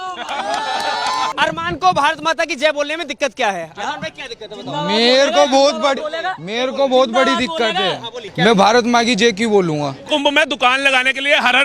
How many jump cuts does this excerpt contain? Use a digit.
3